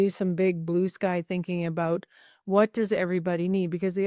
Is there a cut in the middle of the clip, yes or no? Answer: no